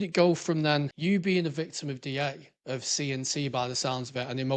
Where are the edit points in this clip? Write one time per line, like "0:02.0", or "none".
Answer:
0:00.9